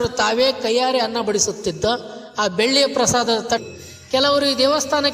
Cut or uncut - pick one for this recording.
cut